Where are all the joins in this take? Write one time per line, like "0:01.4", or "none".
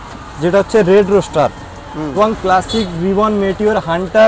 0:02.2